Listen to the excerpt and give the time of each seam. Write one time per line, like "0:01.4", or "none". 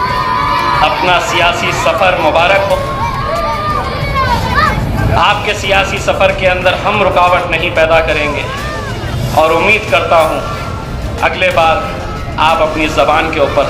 none